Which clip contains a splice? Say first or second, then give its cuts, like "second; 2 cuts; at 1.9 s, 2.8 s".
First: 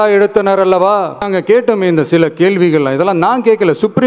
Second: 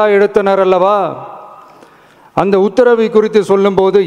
first; 1 cut; at 1.2 s